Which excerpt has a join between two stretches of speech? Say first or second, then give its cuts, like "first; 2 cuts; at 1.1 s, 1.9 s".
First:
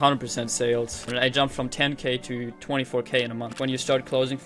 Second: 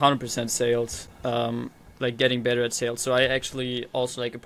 first; 2 cuts; at 1.1 s, 3.5 s